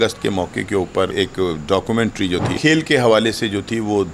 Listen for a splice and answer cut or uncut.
cut